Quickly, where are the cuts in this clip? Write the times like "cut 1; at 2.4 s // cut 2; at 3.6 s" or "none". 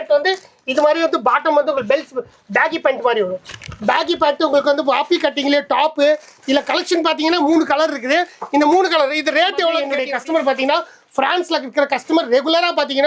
cut 1; at 9.9 s